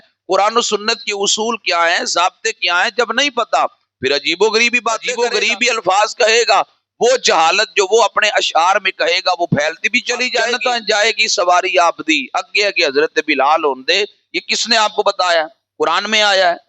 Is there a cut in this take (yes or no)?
yes